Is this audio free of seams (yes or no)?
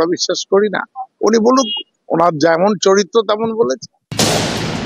no